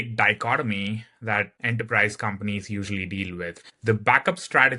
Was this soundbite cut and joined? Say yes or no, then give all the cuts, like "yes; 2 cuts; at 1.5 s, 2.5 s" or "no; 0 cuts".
yes; 2 cuts; at 1.6 s, 3.5 s